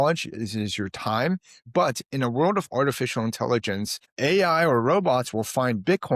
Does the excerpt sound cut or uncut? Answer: cut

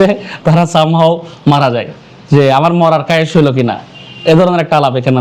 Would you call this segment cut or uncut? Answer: uncut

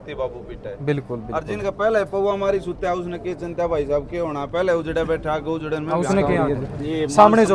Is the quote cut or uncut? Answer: cut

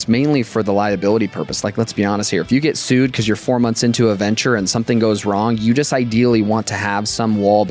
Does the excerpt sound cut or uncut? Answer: uncut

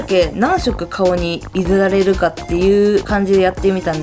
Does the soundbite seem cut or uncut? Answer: cut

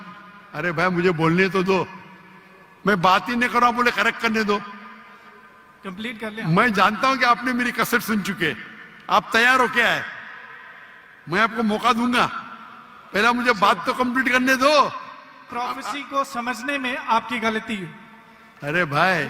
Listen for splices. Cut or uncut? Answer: cut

